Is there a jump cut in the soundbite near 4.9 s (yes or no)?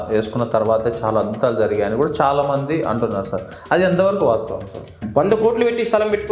yes